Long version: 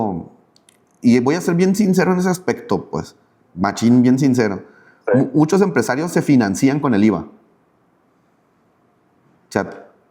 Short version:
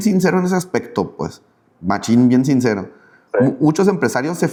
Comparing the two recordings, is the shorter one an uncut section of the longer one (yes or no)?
yes